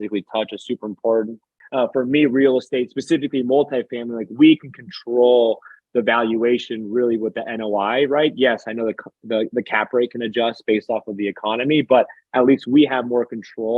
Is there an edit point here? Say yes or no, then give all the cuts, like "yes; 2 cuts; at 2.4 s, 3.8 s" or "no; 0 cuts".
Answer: yes; 1 cut; at 1.5 s